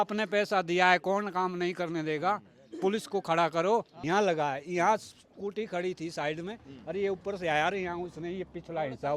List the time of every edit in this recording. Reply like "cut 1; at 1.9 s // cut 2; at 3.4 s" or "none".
cut 1; at 3.9 s